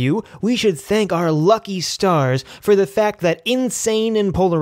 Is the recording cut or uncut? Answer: uncut